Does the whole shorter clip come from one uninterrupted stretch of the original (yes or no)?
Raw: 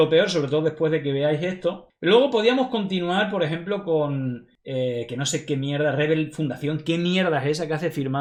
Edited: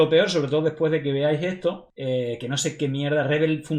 no